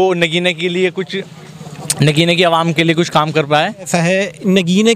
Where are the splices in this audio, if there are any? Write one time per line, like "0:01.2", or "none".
0:03.9